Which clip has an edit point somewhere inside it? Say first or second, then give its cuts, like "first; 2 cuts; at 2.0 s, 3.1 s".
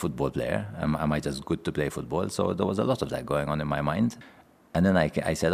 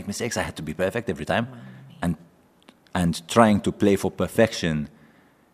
first; 1 cut; at 4.2 s